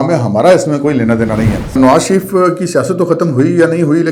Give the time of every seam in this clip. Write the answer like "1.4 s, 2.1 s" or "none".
1.8 s